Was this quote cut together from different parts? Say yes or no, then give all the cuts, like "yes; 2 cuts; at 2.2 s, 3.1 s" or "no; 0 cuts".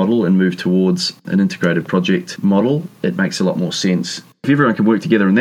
yes; 3 cuts; at 1.2 s, 2.9 s, 4.4 s